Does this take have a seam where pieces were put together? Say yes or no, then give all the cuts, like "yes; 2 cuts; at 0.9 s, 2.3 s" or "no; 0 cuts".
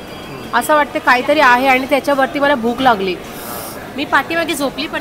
no; 0 cuts